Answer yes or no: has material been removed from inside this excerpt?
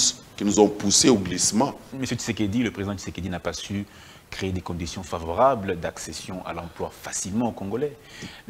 yes